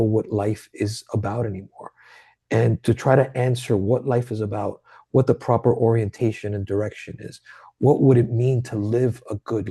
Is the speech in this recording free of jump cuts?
yes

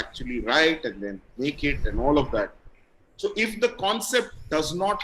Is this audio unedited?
yes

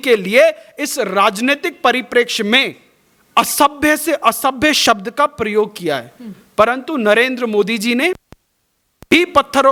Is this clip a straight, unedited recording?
yes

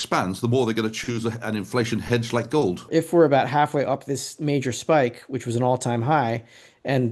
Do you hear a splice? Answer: yes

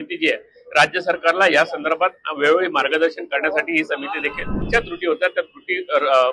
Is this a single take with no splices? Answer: no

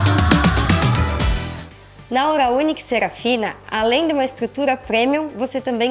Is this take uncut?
no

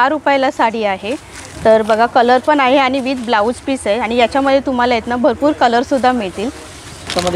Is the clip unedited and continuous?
yes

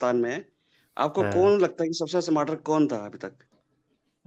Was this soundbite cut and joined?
no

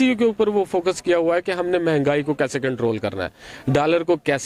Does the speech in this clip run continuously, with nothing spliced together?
yes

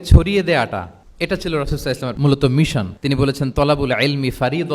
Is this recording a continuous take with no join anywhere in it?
no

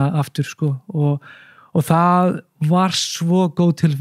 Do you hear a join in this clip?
no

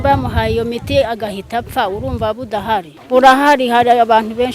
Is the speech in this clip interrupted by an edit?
yes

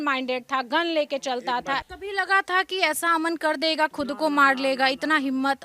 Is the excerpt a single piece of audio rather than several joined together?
no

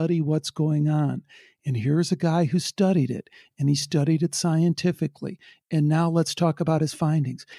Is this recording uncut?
yes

